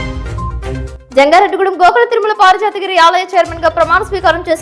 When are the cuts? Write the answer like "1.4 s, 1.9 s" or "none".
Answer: none

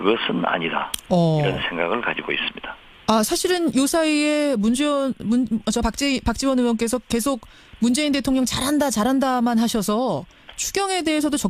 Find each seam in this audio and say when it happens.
4.8 s

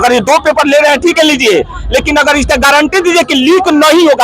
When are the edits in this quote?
none

